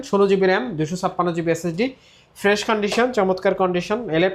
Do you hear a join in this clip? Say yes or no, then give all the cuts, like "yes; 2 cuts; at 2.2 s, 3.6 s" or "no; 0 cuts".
no; 0 cuts